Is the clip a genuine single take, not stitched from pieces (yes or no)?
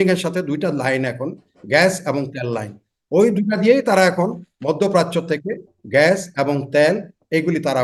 yes